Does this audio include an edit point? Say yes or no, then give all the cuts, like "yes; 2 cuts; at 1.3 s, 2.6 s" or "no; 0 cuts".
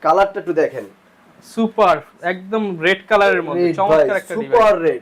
no; 0 cuts